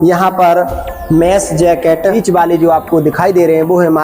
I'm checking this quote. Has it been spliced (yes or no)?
yes